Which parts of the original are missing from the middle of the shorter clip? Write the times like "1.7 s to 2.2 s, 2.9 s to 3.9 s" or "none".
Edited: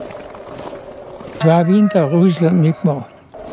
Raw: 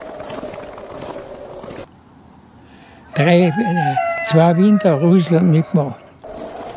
1.8 s to 4.2 s